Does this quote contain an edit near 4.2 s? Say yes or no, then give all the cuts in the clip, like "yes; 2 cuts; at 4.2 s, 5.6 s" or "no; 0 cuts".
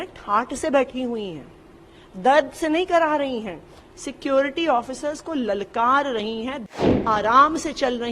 no; 1 cut; at 6.7 s